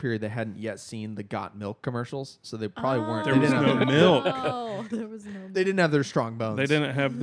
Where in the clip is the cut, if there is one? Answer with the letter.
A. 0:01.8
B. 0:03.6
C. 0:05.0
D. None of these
D